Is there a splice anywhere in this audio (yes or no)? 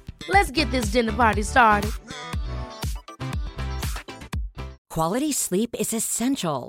yes